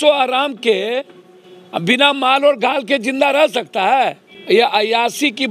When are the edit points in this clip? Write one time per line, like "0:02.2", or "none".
0:04.3